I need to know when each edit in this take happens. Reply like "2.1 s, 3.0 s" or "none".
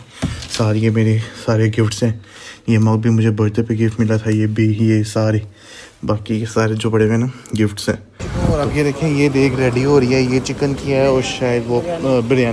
8.3 s